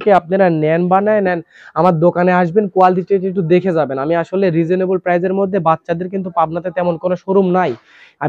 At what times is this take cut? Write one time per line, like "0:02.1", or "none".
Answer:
none